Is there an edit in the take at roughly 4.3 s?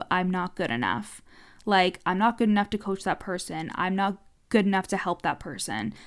yes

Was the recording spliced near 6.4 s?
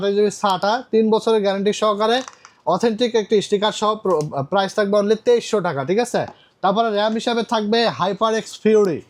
no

